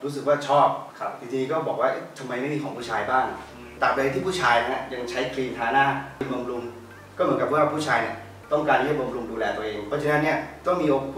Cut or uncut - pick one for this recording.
cut